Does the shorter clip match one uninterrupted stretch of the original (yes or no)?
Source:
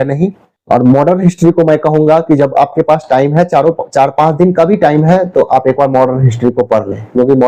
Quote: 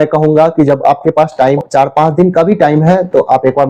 no